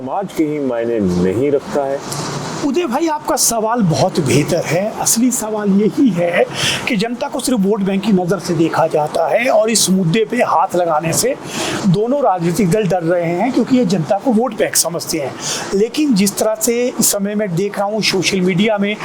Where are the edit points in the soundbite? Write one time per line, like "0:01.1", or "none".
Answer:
none